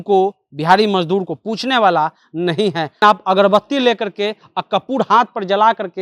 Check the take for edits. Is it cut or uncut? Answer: cut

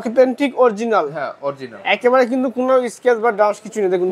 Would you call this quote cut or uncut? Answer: uncut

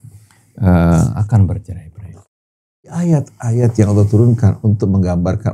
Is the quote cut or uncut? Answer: cut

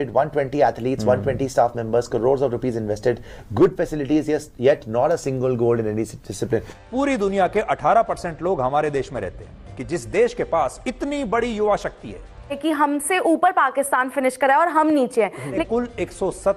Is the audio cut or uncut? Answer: cut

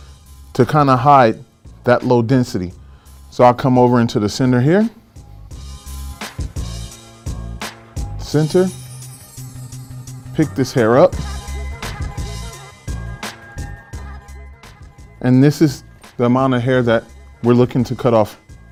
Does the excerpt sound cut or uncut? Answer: uncut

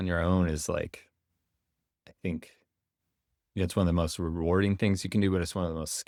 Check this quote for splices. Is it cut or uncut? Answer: uncut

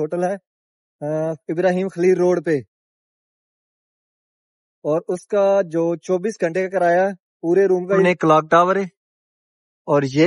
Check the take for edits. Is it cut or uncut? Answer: cut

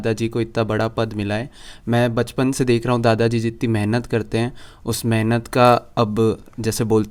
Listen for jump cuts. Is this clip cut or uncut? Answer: uncut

